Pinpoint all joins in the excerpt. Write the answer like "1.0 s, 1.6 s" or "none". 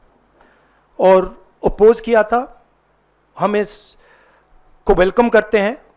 none